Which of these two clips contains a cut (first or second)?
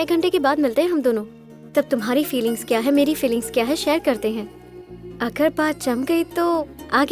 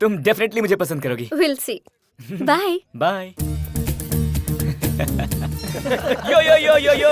second